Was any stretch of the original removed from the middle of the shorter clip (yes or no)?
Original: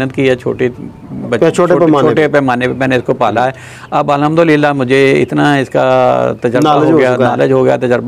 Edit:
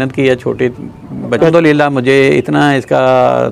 yes